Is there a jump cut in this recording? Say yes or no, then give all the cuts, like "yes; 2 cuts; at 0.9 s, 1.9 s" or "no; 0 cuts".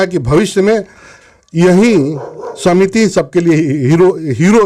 no; 0 cuts